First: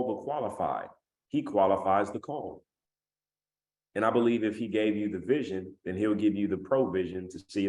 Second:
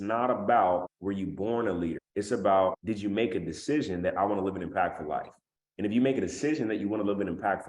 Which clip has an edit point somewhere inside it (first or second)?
second